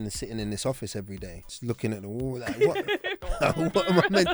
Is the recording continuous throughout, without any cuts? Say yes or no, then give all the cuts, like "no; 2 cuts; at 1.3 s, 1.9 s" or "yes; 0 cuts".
yes; 0 cuts